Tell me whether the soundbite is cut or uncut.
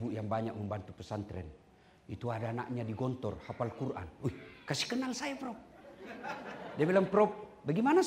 uncut